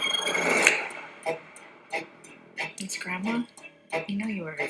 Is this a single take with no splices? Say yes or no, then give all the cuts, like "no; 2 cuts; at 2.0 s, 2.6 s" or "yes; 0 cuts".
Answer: no; 1 cut; at 1.8 s